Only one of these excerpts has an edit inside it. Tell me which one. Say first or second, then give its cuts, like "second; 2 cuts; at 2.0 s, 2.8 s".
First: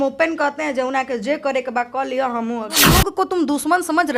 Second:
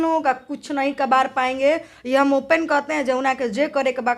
first; 1 cut; at 2.9 s